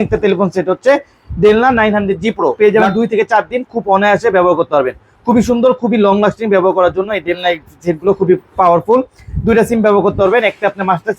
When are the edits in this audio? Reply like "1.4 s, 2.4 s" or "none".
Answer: 2.7 s